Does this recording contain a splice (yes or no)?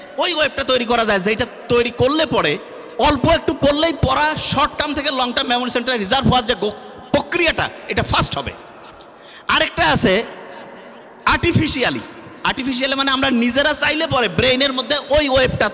no